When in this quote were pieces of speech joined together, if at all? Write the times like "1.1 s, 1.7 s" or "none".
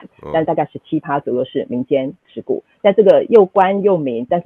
none